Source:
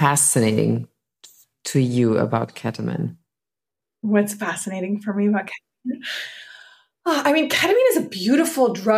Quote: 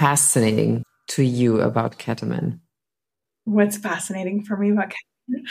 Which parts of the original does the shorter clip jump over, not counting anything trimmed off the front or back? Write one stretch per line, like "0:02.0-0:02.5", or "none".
0:01.0-0:01.5